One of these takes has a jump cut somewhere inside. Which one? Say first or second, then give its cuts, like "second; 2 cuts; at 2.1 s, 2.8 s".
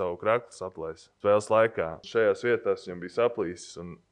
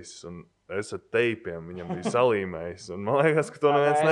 first; 2 cuts; at 1.0 s, 2.0 s